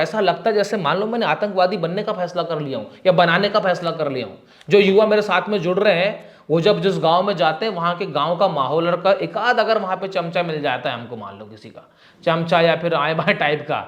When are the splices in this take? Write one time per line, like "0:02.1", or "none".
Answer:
none